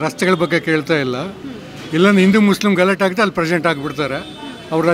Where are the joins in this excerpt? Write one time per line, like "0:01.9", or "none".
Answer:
none